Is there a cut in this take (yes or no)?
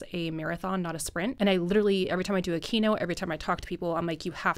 yes